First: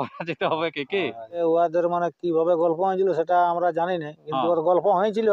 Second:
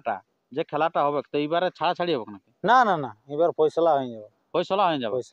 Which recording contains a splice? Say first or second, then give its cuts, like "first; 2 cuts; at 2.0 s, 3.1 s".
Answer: first; 1 cut; at 1.4 s